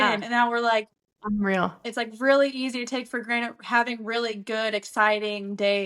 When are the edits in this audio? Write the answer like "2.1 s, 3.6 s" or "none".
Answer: 1.8 s